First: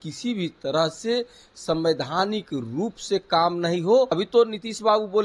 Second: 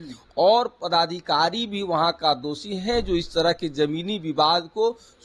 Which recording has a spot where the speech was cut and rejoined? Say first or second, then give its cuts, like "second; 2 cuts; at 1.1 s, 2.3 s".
first; 1 cut; at 4.1 s